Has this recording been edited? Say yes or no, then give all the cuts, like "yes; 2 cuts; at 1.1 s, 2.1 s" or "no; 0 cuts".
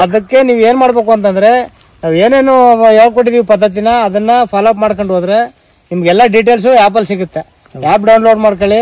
no; 0 cuts